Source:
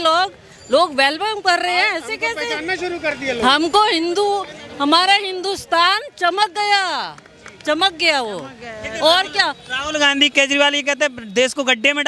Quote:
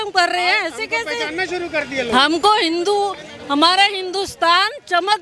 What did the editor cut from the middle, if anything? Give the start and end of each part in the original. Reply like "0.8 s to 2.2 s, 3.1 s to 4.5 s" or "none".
none